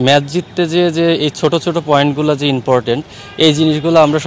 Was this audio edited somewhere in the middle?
no; 0 cuts

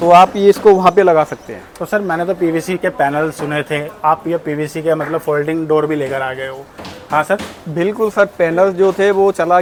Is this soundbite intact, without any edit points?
yes; 0 cuts

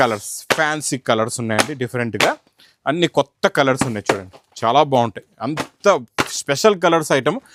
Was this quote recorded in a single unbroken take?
yes; 0 cuts

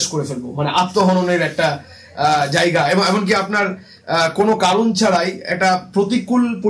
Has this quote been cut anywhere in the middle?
no; 0 cuts

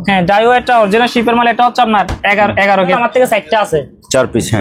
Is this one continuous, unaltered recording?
no; 1 cut; at 2.9 s

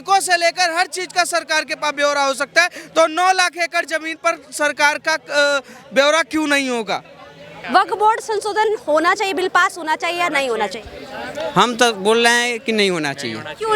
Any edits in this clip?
yes; 1 cut; at 7.7 s

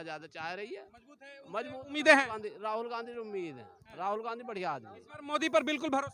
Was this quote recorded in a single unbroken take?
yes; 0 cuts

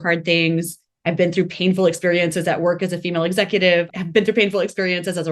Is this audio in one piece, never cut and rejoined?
no; 1 cut; at 3.9 s

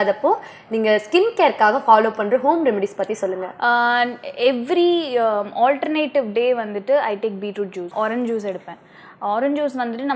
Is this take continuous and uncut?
yes; 0 cuts

